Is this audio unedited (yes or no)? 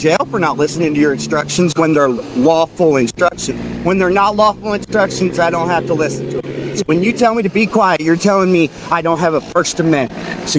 yes